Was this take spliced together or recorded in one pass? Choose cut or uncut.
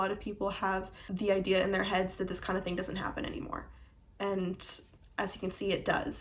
cut